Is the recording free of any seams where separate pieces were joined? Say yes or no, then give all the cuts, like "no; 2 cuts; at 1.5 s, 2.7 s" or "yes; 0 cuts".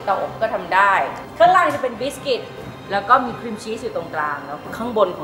no; 1 cut; at 1.2 s